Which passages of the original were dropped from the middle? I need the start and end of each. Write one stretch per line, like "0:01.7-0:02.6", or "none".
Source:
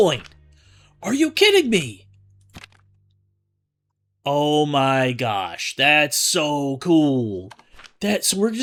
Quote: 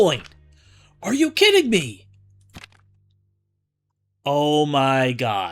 none